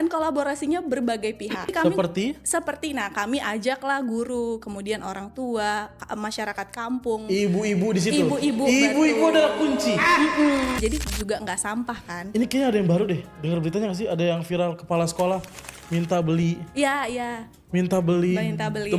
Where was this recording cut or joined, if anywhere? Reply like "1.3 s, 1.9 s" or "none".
1.7 s, 10.8 s

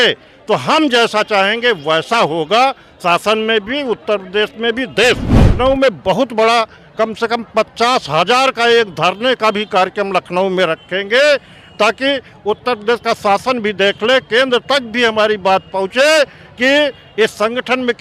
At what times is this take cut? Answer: 5.5 s

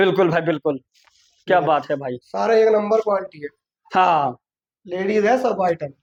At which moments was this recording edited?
none

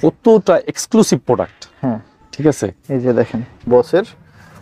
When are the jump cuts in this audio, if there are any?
3.5 s

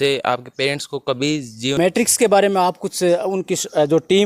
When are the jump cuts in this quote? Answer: 1.8 s

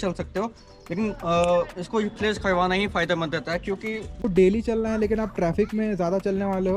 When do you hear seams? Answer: 4.2 s

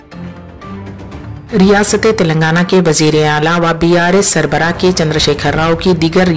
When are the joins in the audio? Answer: 1.5 s

